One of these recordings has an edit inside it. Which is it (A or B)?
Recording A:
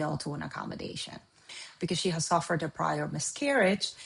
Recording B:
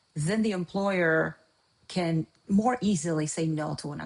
A